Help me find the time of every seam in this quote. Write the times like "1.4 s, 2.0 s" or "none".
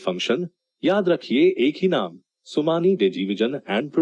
none